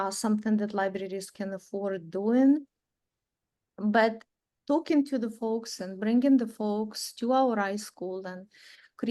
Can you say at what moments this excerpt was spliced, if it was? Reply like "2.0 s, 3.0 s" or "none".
none